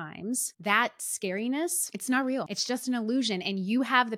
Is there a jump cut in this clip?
yes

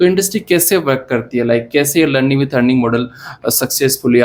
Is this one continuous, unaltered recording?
yes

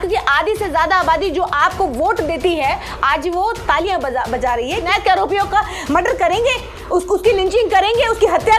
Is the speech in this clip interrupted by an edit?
yes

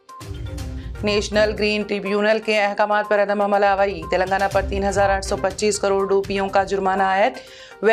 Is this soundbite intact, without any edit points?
yes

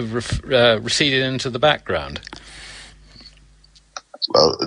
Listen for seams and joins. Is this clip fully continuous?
yes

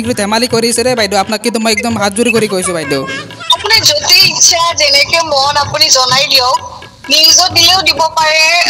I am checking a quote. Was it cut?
no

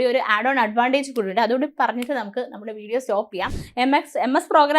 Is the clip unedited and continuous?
no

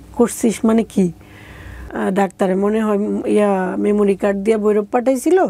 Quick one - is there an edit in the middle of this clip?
yes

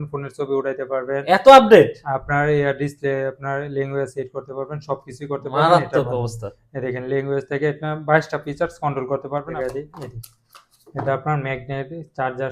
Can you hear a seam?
yes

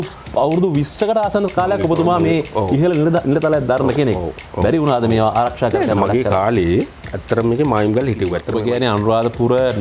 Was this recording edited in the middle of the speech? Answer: yes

